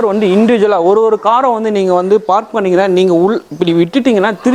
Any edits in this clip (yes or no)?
no